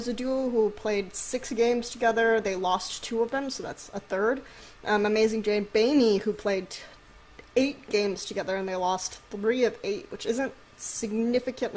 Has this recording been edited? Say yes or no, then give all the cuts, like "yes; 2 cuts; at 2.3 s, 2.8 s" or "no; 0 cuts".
no; 0 cuts